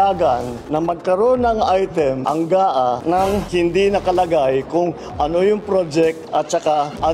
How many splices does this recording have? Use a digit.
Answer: 0